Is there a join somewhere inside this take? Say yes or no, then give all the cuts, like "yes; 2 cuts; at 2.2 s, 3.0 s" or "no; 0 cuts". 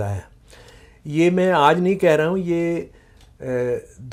no; 0 cuts